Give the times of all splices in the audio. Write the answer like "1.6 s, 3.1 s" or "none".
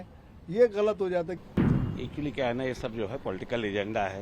1.5 s